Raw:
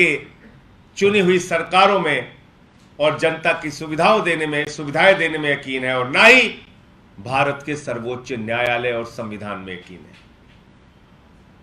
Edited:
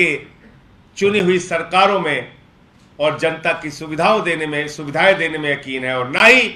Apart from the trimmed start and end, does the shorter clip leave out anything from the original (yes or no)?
no